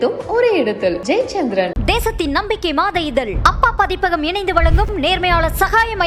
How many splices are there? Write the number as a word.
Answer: zero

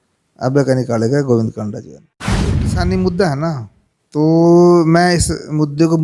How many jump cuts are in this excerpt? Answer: one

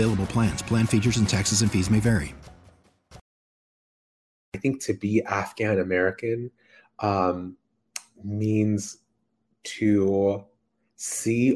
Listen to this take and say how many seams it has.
one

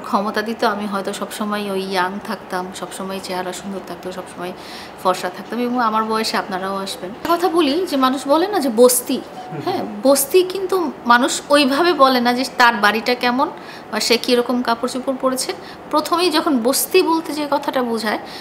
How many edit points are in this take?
one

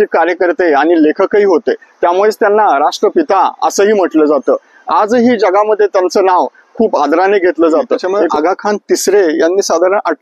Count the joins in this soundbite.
one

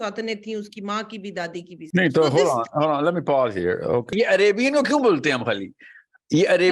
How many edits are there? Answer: two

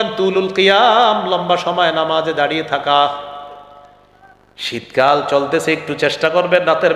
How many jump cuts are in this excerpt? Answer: zero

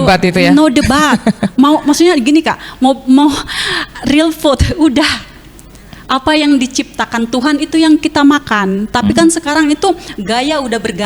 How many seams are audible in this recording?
zero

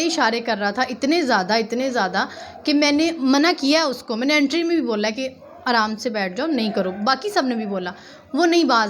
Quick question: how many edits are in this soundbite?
zero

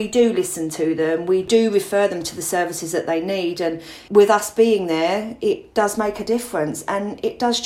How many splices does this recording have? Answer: three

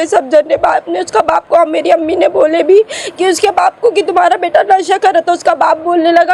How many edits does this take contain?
zero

